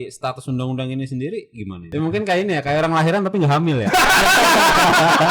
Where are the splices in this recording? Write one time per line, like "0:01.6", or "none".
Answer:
0:01.8